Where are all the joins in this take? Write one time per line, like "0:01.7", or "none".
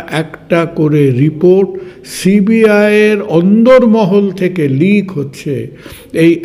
none